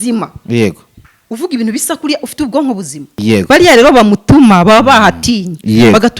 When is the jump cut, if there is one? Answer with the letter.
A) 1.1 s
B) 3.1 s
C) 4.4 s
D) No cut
B